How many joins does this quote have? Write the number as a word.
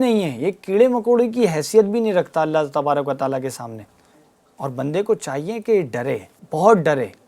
one